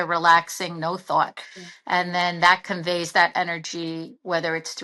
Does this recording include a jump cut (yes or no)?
no